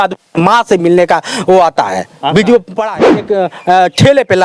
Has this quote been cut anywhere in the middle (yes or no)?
yes